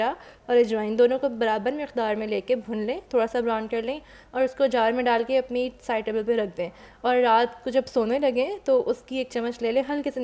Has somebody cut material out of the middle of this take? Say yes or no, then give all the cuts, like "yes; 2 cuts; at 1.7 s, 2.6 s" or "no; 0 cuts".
no; 0 cuts